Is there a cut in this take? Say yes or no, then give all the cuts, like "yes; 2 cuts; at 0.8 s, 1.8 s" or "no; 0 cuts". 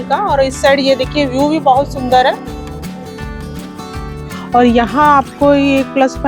yes; 2 cuts; at 2.8 s, 4.5 s